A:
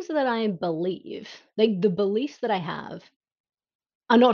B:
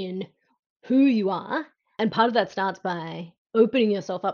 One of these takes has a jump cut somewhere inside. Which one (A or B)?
B